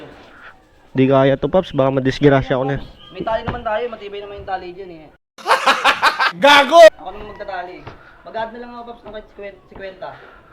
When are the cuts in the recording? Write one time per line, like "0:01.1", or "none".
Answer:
none